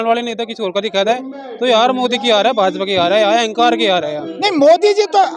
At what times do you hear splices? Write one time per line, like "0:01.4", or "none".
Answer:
0:04.2

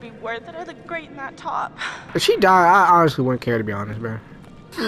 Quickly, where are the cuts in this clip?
0:02.0

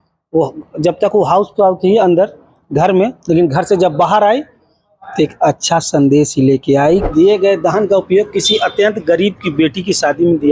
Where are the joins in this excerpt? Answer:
0:07.0

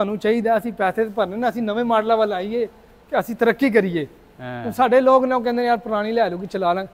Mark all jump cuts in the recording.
none

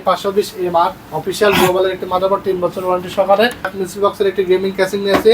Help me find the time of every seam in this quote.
0:03.8

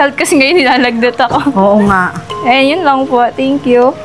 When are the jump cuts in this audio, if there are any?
none

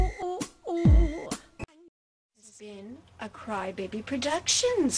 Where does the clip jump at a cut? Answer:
0:01.5

